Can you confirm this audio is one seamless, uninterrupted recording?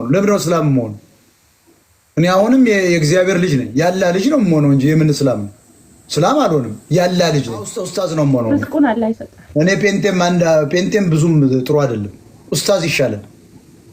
no; 1 cut; at 7.6 s

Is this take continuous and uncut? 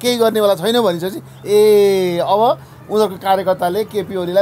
yes; 0 cuts

